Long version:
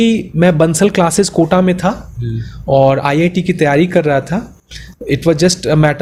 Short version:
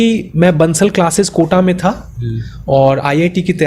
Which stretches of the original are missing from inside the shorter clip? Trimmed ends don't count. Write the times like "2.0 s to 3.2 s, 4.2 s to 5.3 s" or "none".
none